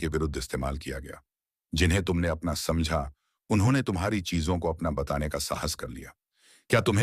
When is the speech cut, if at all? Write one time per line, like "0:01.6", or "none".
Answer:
none